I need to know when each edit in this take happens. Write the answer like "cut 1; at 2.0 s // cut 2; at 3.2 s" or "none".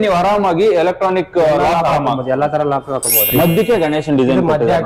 cut 1; at 3.3 s